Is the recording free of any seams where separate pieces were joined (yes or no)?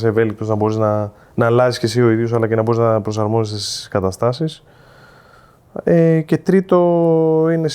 yes